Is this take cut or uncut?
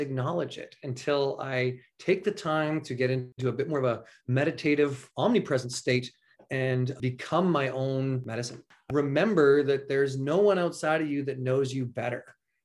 cut